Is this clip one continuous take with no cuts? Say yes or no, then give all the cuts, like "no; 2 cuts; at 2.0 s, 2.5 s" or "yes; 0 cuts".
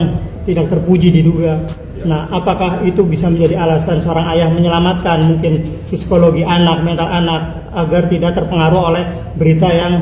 yes; 0 cuts